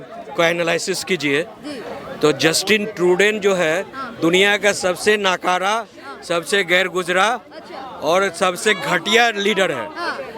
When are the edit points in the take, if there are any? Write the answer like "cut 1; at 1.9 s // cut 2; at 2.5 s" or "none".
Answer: none